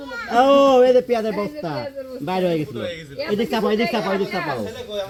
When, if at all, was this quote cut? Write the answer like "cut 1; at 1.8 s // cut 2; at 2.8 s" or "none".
none